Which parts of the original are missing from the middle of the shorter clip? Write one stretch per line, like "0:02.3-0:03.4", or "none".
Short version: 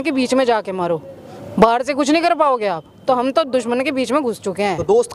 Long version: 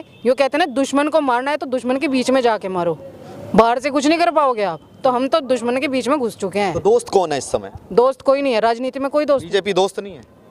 none